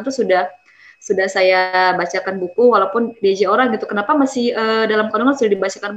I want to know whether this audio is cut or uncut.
uncut